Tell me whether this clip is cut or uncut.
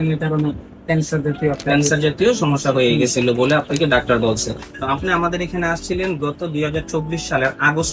cut